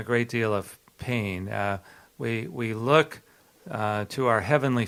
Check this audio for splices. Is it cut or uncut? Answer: uncut